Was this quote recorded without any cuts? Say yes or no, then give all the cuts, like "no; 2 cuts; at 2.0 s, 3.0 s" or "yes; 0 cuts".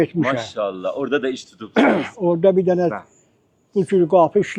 yes; 0 cuts